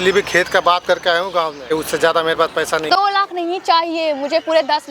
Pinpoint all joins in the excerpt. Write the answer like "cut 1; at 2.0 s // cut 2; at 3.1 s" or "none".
cut 1; at 1.7 s // cut 2; at 2.9 s